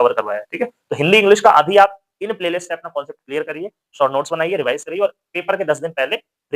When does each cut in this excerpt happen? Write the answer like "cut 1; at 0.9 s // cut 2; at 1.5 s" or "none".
none